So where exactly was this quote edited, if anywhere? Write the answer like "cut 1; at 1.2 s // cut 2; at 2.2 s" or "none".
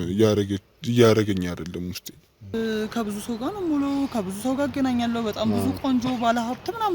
cut 1; at 2.5 s